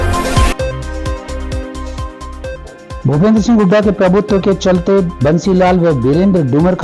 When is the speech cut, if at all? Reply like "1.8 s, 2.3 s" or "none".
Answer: none